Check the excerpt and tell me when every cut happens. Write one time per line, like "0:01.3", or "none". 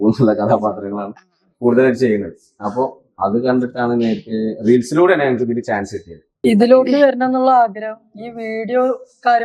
0:06.4